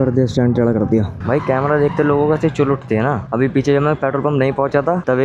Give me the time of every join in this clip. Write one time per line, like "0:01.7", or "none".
0:01.2